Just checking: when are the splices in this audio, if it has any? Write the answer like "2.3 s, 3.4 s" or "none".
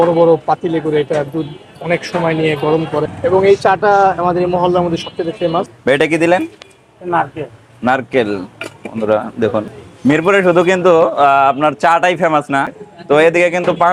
3.0 s, 5.7 s, 9.8 s, 12.8 s